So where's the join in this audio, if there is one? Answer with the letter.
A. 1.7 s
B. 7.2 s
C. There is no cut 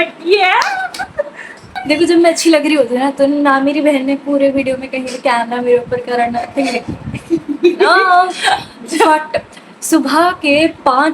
A